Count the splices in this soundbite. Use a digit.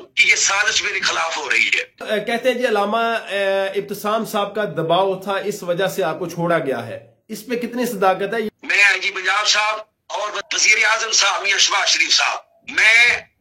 2